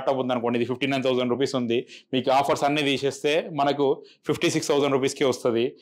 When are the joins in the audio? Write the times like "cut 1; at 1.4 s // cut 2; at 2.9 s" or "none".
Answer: none